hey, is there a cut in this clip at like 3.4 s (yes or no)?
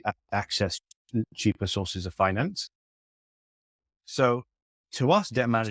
no